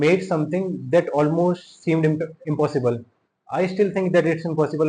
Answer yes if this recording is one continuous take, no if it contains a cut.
yes